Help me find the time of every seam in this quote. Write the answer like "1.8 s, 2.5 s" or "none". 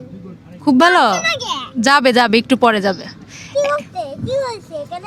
none

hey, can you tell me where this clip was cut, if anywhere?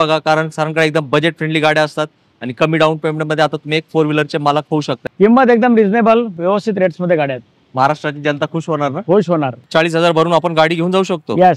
5.0 s, 9.7 s

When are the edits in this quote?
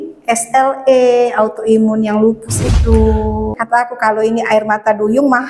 3.5 s

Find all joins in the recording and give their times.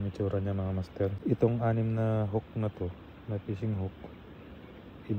1.2 s

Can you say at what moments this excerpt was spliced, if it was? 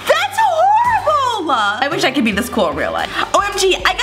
1.8 s, 3.1 s

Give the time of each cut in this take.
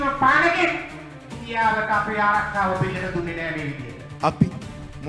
none

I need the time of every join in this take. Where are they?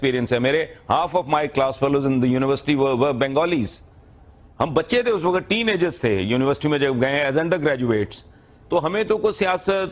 none

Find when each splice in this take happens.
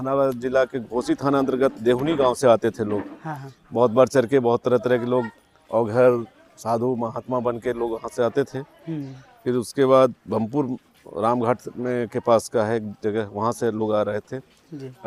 none

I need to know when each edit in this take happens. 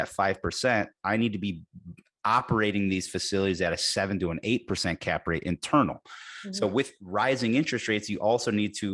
none

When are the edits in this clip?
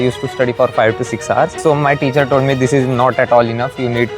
1.5 s

